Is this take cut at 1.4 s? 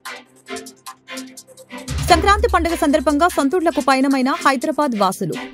yes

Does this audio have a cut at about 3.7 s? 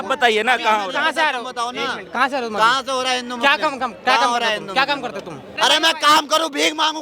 no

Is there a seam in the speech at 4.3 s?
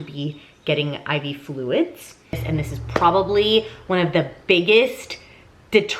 no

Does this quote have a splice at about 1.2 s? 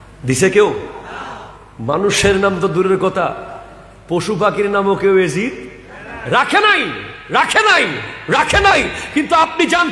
no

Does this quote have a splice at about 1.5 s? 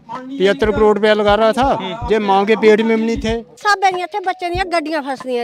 no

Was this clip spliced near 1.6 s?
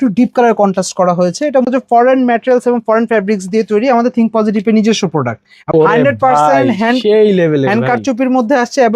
yes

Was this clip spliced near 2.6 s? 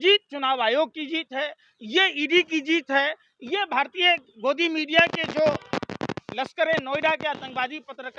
no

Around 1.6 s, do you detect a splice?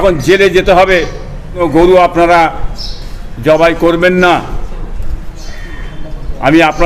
yes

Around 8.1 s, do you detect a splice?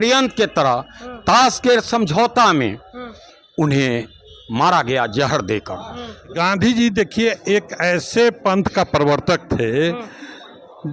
no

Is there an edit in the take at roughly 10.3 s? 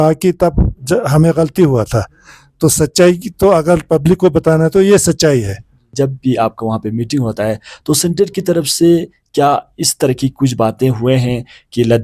no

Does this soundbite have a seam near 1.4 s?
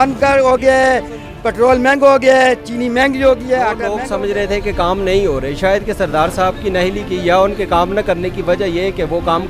no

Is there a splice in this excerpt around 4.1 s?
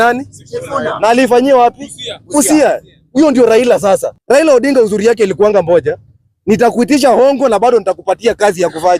yes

